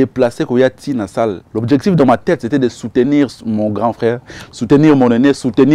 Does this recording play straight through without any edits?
no; 1 cut; at 1.5 s

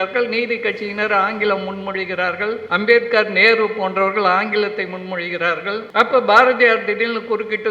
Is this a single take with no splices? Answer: no; 2 cuts; at 2.6 s, 5.9 s

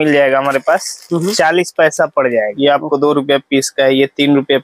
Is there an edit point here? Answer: yes; 1 cut; at 2.5 s

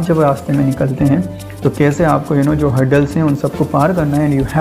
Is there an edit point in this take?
no; 0 cuts

